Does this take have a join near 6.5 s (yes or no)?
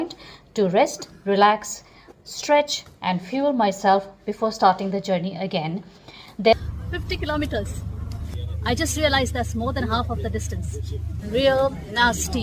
yes